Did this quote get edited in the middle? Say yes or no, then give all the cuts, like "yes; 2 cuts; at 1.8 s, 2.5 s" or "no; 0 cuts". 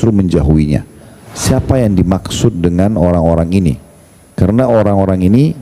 yes; 1 cut; at 1.1 s